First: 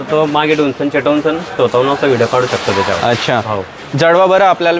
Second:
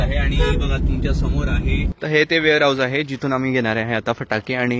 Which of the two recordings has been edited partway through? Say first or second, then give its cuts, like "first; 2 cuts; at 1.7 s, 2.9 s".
second; 1 cut; at 1.9 s